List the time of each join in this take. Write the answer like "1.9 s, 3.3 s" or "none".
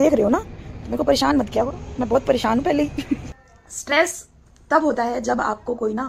3.4 s